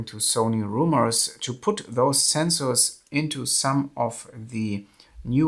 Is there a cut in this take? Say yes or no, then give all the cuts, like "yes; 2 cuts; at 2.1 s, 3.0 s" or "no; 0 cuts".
no; 0 cuts